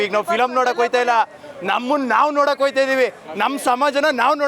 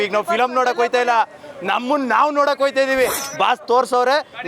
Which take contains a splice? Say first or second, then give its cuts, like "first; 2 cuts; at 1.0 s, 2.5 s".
second; 1 cut; at 3.2 s